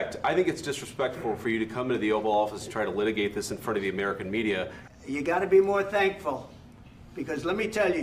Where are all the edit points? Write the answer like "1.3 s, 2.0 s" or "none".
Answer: 4.8 s